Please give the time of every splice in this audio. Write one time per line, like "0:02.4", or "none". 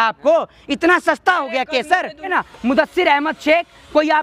0:02.3